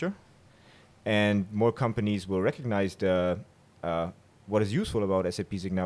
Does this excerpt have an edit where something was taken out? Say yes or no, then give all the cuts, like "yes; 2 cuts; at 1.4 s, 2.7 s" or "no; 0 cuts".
no; 0 cuts